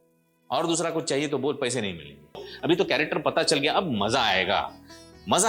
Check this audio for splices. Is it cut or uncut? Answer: cut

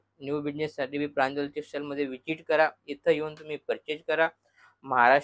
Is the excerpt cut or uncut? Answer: uncut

